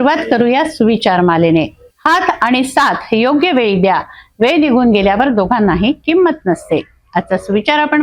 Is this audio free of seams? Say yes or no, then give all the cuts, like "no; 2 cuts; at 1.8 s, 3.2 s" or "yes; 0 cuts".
yes; 0 cuts